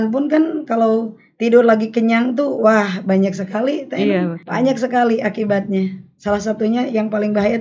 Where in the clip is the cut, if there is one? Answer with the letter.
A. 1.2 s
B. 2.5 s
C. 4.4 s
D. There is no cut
C